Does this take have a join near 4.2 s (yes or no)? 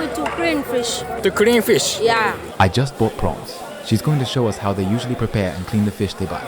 no